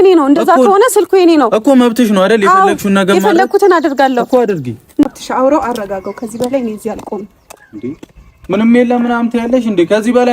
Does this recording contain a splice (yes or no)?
yes